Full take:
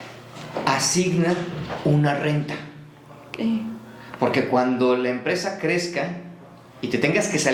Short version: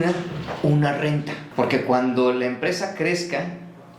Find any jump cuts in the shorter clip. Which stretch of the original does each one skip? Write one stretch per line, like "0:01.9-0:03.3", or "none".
0:02.6-0:04.0